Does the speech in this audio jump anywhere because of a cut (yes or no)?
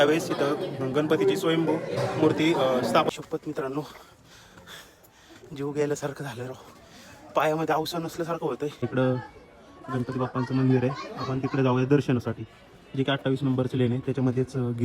yes